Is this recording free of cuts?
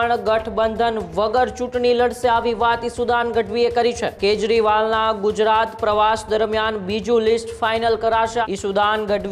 no; 2 cuts; at 4.1 s, 8.4 s

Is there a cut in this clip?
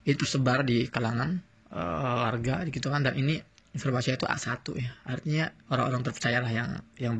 yes; 1 cut; at 5.6 s

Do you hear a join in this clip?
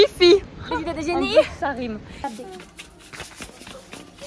yes; 1 cut; at 2.2 s

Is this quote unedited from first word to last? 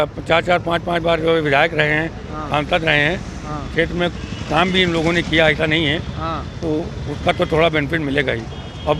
yes; 0 cuts

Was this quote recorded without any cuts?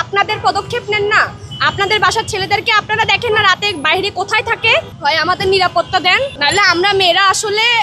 no; 2 cuts; at 4.9 s, 6.4 s

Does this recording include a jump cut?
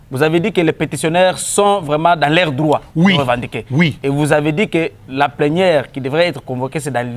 no; 0 cuts

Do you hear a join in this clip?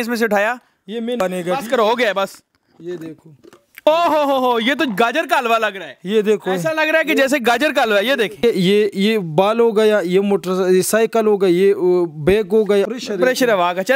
yes; 3 cuts; at 1.2 s, 8.4 s, 12.9 s

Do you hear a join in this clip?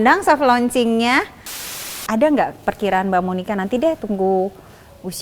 yes; 1 cut; at 1.7 s

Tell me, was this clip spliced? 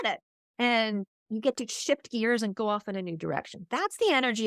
no; 0 cuts

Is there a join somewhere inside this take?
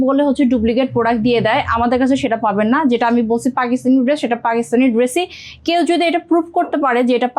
no; 0 cuts

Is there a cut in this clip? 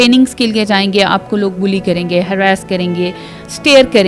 no; 0 cuts

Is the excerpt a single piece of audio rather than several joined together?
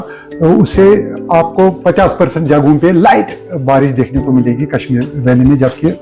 yes; 0 cuts

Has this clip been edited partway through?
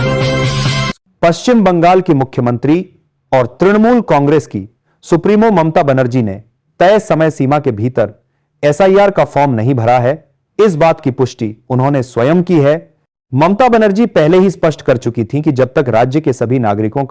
yes; 1 cut; at 1.0 s

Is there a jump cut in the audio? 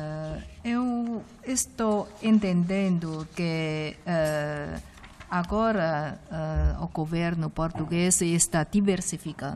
yes; 1 cut; at 7.9 s

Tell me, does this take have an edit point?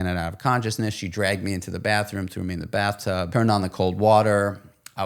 yes; 1 cut; at 3.3 s

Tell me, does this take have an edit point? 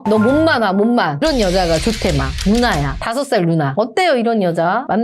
yes; 2 cuts; at 1.2 s, 3.7 s

